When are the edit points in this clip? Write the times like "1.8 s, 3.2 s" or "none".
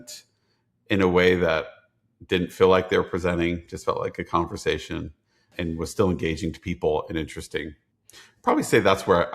5.4 s